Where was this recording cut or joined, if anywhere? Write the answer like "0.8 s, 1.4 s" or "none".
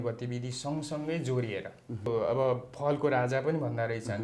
2.1 s